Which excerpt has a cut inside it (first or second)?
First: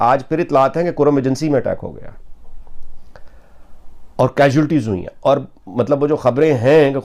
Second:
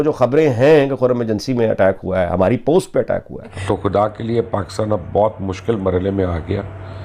second